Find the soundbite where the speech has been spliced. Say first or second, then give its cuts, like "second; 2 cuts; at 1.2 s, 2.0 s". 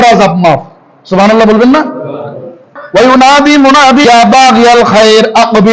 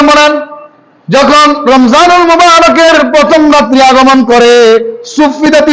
first; 2 cuts; at 2.7 s, 4.0 s